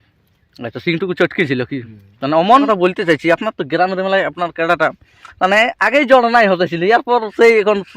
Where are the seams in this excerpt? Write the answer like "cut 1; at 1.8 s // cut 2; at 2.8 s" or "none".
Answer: cut 1; at 2.6 s